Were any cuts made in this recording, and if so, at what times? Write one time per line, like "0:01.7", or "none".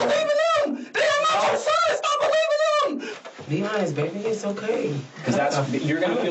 0:03.1